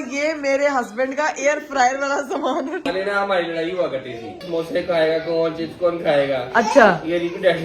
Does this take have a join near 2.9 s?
yes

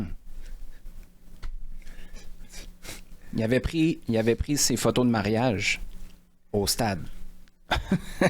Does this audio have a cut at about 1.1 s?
yes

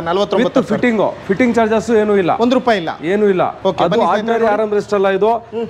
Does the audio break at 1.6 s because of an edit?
no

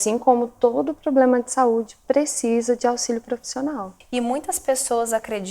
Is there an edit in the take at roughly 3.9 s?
yes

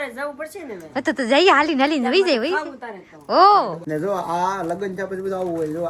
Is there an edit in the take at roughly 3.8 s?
yes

